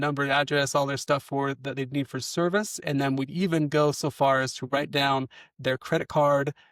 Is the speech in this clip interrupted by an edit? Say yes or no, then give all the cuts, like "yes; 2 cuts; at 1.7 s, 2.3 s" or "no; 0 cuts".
no; 0 cuts